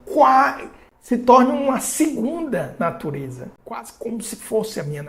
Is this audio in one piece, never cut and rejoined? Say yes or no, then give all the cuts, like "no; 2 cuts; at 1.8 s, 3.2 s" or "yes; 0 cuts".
yes; 0 cuts